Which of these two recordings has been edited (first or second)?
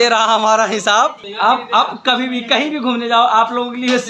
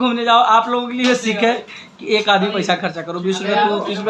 first